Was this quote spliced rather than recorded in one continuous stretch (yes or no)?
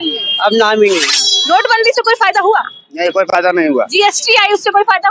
yes